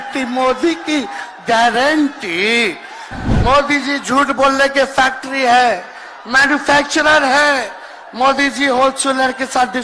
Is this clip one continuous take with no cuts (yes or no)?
no